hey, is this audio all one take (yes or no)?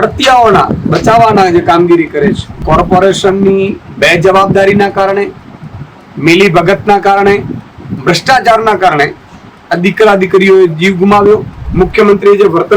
no